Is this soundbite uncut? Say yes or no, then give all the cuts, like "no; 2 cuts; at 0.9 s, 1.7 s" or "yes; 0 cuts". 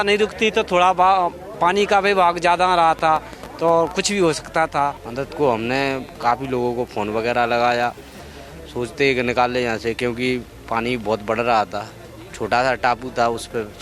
no; 1 cut; at 5.1 s